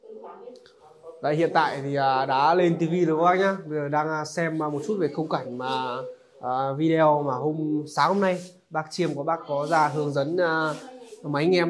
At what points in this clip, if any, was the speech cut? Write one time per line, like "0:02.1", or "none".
none